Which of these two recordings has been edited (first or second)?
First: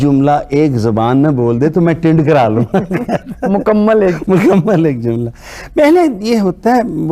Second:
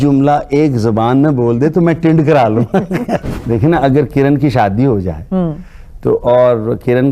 second